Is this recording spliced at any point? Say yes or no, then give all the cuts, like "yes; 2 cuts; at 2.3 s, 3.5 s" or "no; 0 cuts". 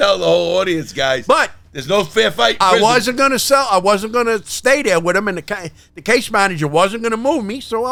no; 0 cuts